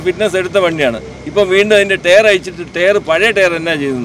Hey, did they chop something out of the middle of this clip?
no; 0 cuts

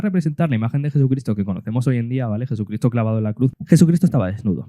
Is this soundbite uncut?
no; 1 cut; at 3.5 s

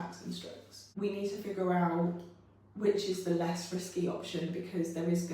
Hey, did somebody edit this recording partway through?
yes; 1 cut; at 0.9 s

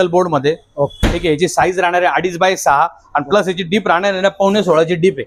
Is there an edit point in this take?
no; 0 cuts

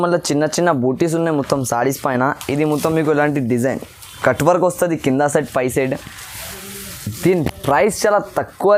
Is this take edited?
no; 0 cuts

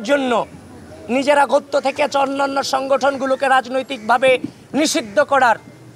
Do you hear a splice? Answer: no; 0 cuts

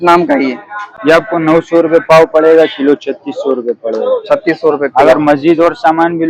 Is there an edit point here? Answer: no; 0 cuts

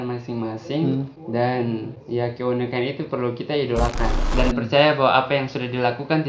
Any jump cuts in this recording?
yes; 1 cut; at 4.3 s

